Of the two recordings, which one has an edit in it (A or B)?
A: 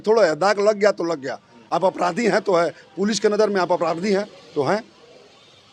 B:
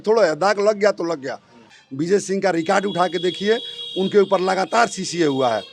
B